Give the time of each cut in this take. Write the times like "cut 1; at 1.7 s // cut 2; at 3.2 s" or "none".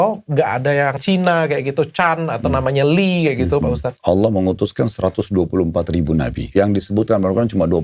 cut 1; at 1.0 s // cut 2; at 3.8 s // cut 3; at 6.4 s